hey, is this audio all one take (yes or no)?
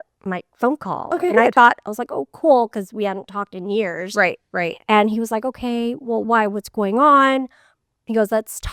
yes